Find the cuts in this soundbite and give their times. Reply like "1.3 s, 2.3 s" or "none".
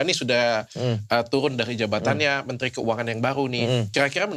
none